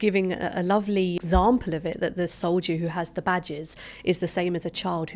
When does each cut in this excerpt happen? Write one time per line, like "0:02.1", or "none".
0:01.2